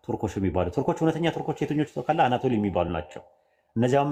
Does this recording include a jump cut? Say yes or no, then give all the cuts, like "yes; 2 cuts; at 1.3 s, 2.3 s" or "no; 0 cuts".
no; 0 cuts